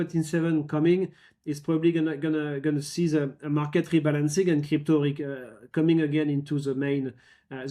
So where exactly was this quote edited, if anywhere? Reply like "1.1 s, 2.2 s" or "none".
none